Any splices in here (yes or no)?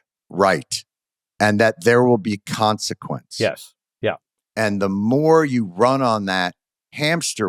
no